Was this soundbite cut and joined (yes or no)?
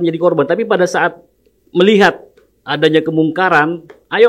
no